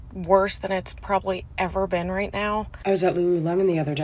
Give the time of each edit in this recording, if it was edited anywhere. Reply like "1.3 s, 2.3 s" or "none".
2.7 s